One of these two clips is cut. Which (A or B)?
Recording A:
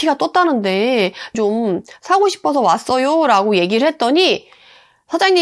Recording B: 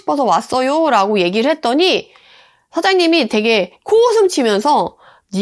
A